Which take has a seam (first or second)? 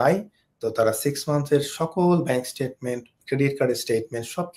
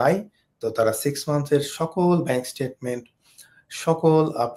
first